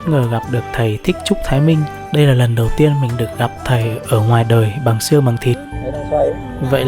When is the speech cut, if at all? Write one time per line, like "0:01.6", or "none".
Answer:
0:05.7